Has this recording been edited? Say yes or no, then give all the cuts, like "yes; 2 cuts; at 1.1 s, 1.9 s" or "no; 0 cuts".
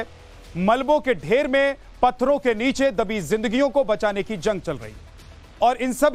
yes; 1 cut; at 4.4 s